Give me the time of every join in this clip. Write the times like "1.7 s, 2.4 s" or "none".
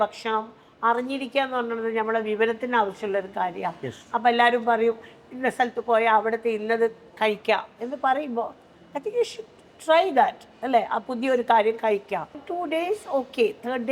12.4 s